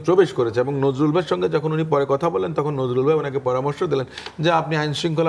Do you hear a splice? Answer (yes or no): no